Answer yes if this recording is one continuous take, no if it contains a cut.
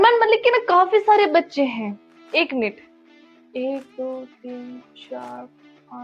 yes